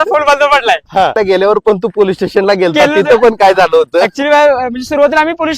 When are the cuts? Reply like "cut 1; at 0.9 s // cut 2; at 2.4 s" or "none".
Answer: cut 1; at 1.2 s